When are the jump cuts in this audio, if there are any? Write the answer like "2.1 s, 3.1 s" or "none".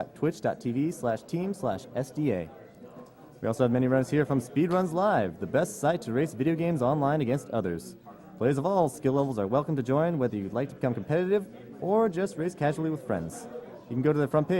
13.3 s